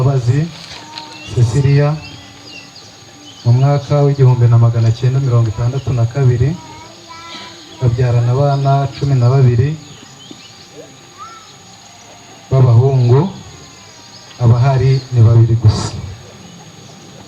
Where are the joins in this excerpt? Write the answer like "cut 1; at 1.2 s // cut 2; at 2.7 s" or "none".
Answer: none